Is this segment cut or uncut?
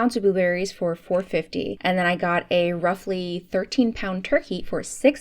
cut